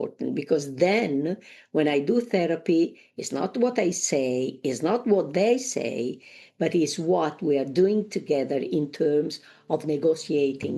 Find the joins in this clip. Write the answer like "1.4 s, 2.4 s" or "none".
7.4 s